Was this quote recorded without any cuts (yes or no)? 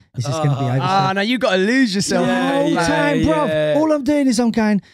yes